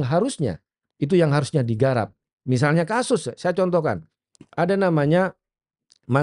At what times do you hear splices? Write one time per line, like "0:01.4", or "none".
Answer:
none